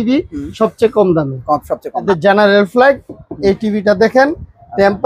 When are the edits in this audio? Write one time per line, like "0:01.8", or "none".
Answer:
0:01.9